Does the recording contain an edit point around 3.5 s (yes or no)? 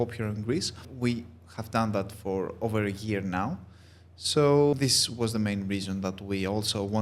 no